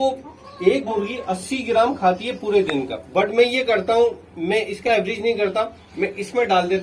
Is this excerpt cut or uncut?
uncut